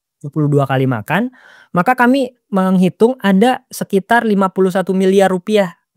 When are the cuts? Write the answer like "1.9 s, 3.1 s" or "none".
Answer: none